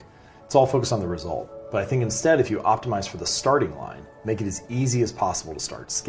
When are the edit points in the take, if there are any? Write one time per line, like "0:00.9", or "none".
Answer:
none